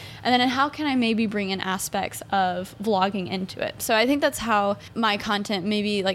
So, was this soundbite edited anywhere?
yes; 1 cut; at 4.9 s

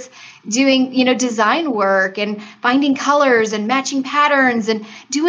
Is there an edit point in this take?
no; 0 cuts

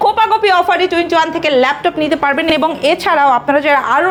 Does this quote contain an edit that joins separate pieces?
no; 0 cuts

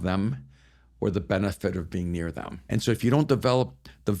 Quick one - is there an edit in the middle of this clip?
yes; 1 cut; at 2.5 s

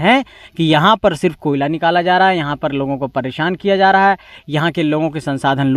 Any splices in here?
no; 0 cuts

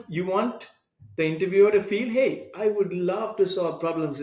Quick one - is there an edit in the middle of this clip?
no; 0 cuts

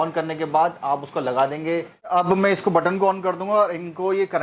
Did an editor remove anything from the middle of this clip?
yes; 1 cut; at 2.1 s

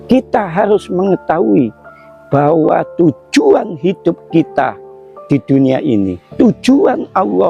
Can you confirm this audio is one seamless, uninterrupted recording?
yes; 0 cuts

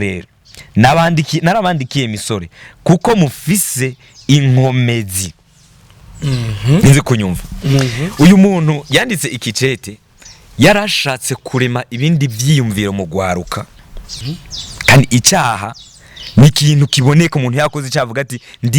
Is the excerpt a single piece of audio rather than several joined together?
no; 1 cut; at 14.0 s

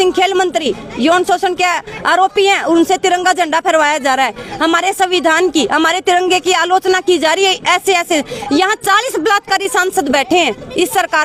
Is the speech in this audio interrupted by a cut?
no; 0 cuts

